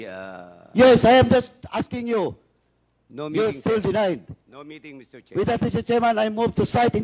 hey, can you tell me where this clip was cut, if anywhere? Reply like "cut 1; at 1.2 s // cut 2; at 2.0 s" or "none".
none